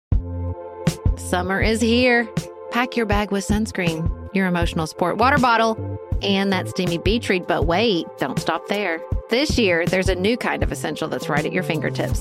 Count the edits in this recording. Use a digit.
1